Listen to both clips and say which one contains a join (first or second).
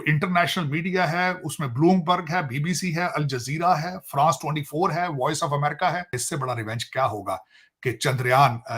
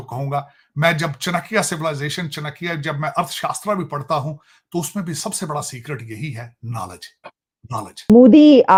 first